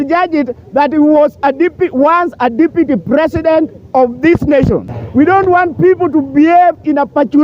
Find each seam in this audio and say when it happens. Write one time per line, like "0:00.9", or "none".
0:05.0